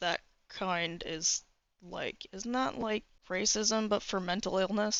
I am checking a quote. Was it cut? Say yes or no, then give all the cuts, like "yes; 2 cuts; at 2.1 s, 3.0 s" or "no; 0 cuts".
no; 0 cuts